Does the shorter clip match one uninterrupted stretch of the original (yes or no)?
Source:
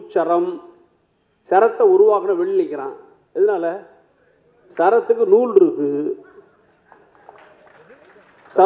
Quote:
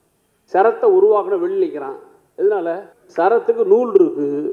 no